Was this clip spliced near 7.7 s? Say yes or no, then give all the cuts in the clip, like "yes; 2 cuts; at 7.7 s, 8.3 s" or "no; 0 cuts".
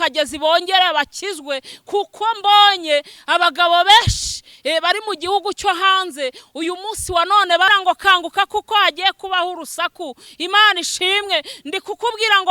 yes; 1 cut; at 7.7 s